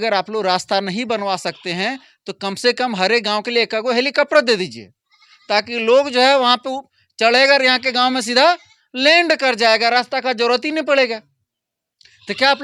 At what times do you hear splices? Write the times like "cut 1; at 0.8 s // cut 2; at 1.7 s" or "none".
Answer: none